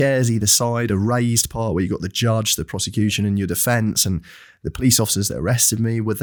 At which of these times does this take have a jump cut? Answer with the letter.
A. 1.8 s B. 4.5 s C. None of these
C